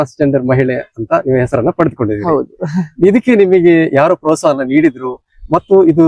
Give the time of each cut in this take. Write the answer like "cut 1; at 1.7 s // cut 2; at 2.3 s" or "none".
none